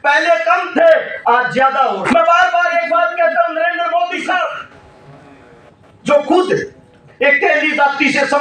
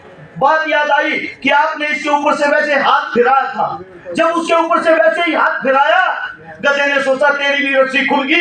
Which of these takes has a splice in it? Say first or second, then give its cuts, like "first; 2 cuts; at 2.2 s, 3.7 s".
first; 1 cut; at 2.1 s